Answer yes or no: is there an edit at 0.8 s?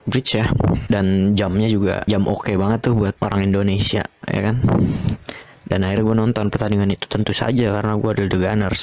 yes